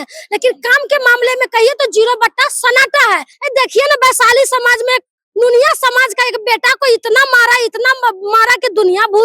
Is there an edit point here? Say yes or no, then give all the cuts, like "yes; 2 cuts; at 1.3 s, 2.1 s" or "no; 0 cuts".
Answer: yes; 1 cut; at 3.3 s